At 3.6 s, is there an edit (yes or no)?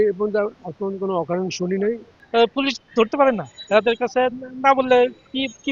no